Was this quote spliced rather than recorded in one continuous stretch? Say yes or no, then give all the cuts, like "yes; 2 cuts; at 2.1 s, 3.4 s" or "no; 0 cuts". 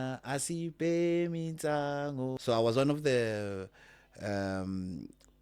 yes; 1 cut; at 2.4 s